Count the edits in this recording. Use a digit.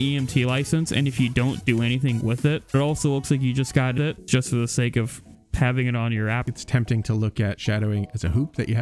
4